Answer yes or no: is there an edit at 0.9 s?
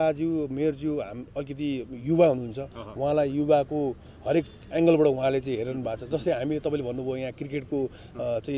no